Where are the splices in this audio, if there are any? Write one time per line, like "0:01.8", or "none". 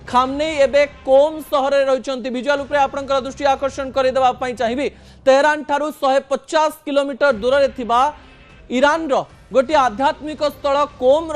0:05.6